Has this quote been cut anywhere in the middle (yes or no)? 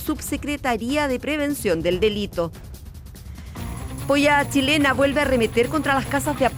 no